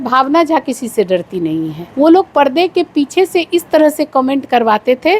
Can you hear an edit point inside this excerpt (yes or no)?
yes